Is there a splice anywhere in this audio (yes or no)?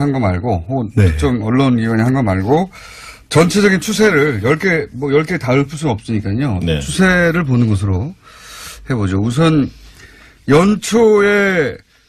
yes